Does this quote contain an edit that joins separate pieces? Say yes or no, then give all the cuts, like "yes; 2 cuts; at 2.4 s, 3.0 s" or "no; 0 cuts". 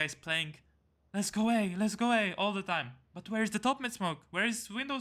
no; 0 cuts